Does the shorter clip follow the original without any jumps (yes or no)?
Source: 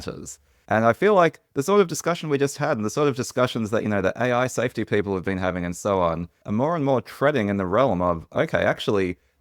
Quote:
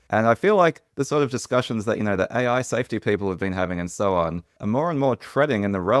no